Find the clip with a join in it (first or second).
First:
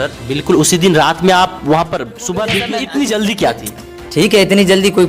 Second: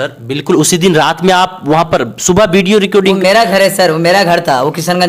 first